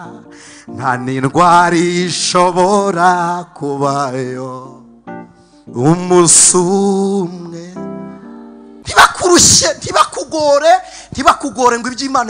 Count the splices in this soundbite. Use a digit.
1